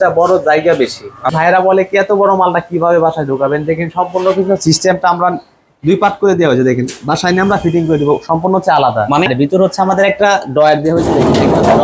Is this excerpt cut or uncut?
cut